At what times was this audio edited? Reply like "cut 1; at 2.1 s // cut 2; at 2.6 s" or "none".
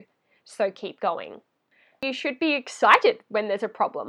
cut 1; at 2.0 s